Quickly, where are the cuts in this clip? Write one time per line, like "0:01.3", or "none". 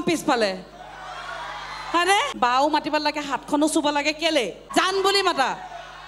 0:02.3
0:04.6